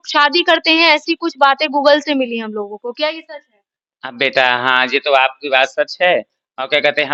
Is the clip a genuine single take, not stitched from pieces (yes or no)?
yes